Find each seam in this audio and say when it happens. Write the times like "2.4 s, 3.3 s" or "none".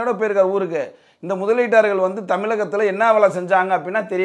none